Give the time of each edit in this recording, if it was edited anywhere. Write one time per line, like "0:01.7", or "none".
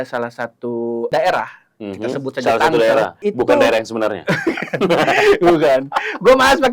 0:01.1
0:03.2